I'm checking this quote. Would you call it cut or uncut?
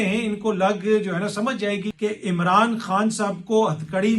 cut